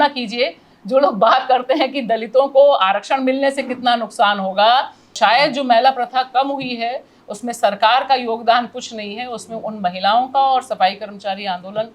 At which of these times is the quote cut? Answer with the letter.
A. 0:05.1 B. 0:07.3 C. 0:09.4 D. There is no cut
A